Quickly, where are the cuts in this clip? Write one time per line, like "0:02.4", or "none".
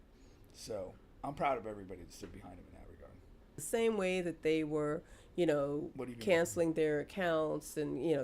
0:03.5